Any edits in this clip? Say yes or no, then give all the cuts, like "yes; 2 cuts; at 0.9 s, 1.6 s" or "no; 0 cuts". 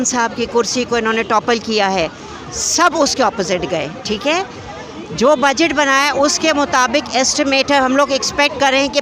no; 0 cuts